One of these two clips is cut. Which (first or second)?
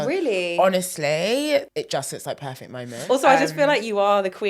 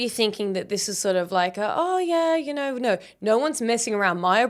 first